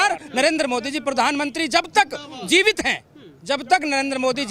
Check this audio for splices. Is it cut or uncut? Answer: uncut